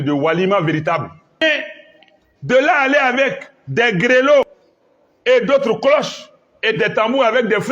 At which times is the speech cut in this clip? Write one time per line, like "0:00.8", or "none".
0:01.4
0:04.6